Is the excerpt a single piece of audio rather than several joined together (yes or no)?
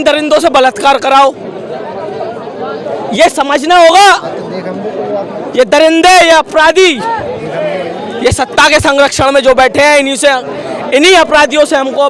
yes